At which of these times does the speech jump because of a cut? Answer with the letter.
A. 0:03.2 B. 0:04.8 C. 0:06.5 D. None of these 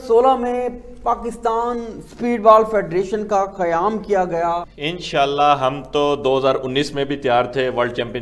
B